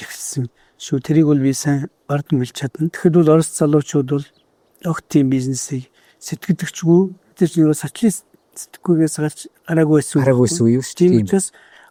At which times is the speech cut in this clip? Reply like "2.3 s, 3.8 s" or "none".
none